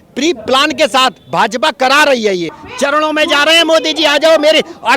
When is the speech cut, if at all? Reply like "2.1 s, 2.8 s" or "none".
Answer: 2.6 s